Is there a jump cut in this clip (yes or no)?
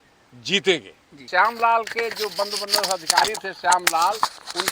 yes